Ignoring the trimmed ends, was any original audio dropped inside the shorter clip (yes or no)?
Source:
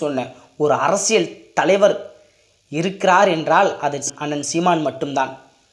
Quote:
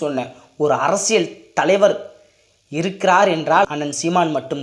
yes